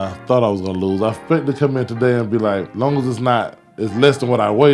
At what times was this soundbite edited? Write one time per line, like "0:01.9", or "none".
0:02.7